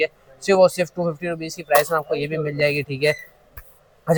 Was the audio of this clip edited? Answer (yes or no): no